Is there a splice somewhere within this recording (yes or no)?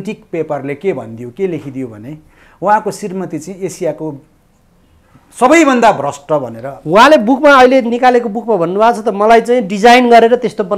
no